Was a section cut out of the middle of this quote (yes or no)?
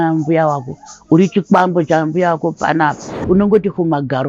yes